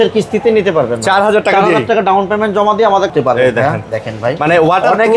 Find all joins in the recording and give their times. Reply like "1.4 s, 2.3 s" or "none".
3.1 s

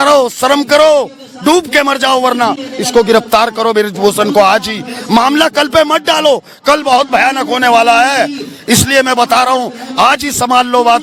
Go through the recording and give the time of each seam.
none

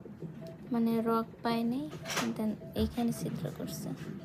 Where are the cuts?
none

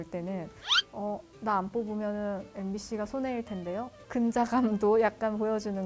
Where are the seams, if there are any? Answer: 4.0 s

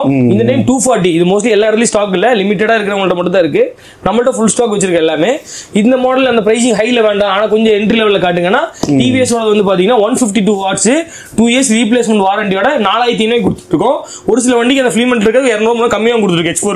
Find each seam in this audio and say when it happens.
none

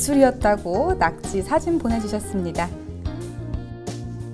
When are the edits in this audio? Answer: 2.8 s

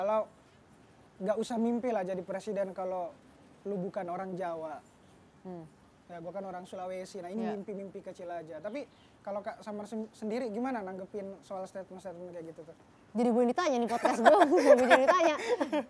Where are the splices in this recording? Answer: none

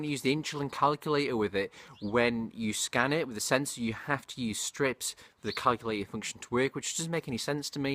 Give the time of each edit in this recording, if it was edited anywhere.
4.3 s

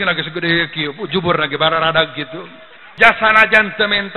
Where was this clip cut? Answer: 2.8 s

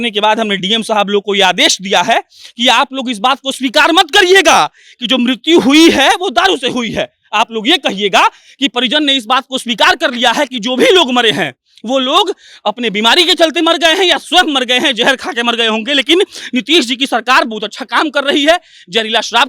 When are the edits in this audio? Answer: none

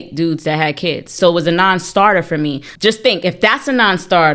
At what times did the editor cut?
1.1 s

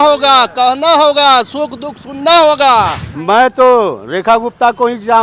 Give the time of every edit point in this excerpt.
3.1 s

